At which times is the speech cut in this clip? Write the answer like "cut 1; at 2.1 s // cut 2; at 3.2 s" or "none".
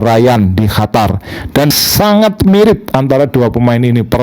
cut 1; at 1.7 s